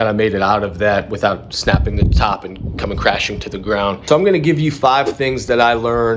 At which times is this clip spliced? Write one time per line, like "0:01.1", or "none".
0:04.1